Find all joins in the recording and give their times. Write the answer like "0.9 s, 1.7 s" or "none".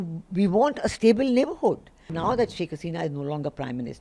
2.0 s